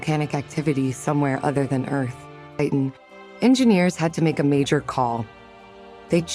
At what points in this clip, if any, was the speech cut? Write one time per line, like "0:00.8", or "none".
0:02.5